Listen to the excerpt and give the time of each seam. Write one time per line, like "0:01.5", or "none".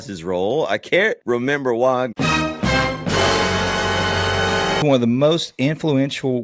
0:01.2
0:04.8